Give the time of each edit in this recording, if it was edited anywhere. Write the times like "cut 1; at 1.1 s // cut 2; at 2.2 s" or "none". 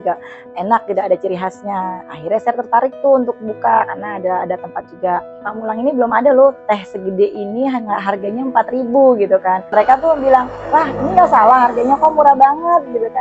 cut 1; at 5.7 s // cut 2; at 9.6 s